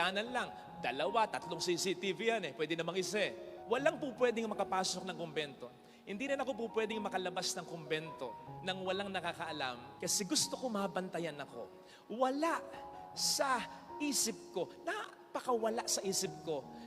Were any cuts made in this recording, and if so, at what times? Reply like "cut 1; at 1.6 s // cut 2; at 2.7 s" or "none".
cut 1; at 3.5 s // cut 2; at 9.9 s